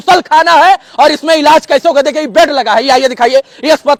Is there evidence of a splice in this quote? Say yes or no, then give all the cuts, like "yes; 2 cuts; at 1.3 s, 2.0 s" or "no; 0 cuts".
no; 0 cuts